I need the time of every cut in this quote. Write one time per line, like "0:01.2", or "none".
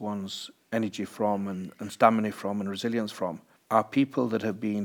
0:03.5